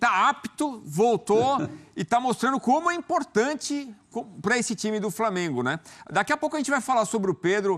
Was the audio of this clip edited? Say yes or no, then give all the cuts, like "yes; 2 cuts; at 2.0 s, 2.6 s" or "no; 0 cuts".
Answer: no; 0 cuts